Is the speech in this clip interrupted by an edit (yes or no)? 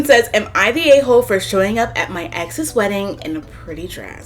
no